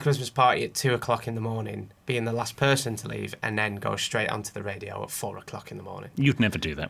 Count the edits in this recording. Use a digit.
0